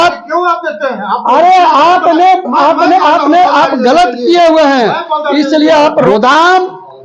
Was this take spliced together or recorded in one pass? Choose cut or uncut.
cut